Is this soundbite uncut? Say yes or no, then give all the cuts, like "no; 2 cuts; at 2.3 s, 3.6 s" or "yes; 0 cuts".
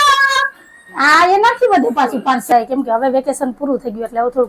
no; 1 cut; at 2.4 s